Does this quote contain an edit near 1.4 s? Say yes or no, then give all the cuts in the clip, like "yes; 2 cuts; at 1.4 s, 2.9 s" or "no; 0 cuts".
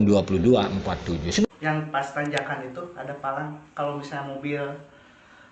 yes; 1 cut; at 1.4 s